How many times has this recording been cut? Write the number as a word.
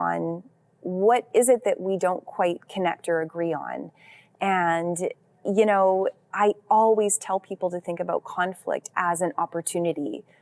zero